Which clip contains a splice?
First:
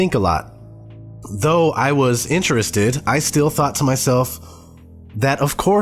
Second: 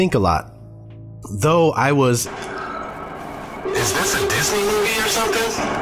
first; 1 cut; at 2.3 s

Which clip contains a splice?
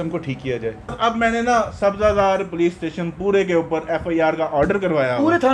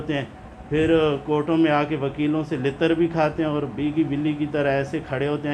first; 1 cut; at 0.9 s

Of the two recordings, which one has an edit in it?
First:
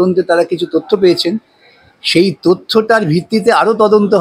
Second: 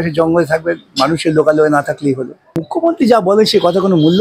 second; 1 cut; at 2.5 s

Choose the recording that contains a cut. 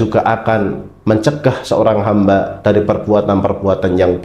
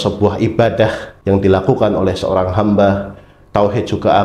second; 1 cut; at 1.1 s

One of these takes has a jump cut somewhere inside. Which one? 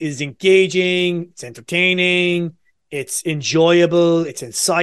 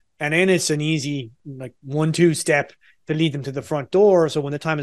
second; 1 cut; at 1.4 s

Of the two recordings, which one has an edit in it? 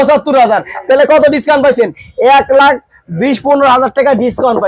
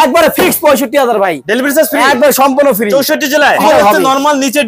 second; 1 cut; at 3.6 s

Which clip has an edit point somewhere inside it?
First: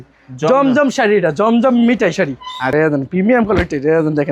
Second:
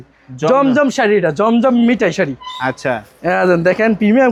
first; 1 cut; at 2.7 s

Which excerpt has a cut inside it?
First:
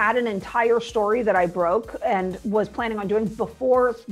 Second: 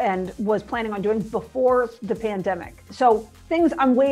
second; 1 cut; at 3.1 s

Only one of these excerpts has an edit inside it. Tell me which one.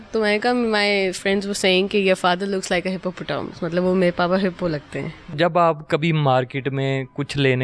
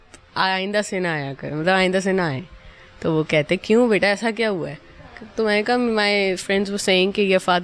first; 1 cut; at 5.4 s

